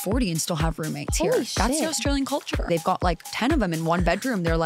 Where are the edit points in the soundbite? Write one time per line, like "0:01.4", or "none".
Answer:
0:02.7